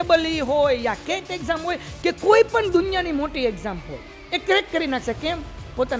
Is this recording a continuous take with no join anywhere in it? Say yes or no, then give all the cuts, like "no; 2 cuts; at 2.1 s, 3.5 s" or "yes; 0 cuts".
yes; 0 cuts